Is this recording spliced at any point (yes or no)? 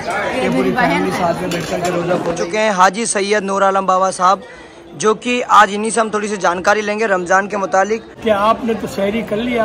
yes